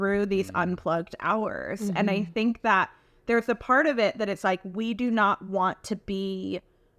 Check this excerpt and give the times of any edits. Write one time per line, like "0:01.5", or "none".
none